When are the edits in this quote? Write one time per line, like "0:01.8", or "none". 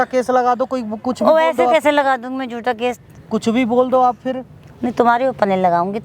none